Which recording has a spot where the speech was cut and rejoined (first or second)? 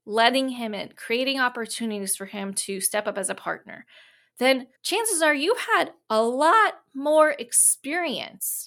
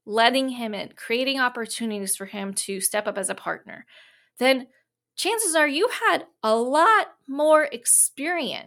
first